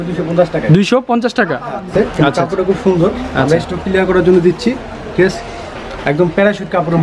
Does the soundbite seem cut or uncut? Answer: cut